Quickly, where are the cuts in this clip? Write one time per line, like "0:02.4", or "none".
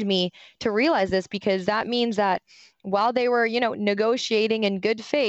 none